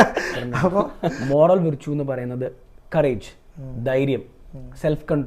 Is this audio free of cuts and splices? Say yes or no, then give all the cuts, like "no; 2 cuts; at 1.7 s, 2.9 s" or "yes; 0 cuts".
no; 1 cut; at 1.2 s